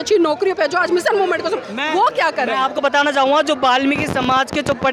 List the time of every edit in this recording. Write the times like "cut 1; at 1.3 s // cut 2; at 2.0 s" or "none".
none